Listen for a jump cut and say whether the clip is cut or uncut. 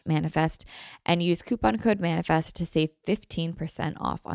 uncut